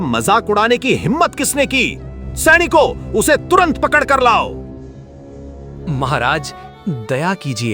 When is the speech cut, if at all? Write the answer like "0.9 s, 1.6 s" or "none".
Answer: 5.7 s